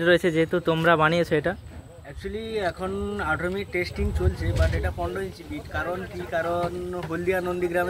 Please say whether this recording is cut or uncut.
uncut